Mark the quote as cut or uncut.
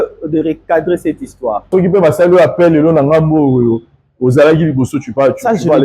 cut